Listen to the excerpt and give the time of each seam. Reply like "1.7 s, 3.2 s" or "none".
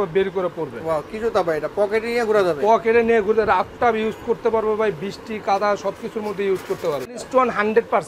7.2 s